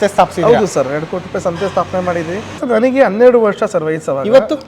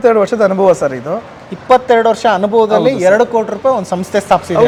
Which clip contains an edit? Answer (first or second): first